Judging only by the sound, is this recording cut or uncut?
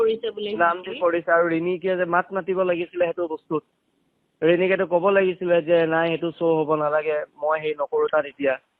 uncut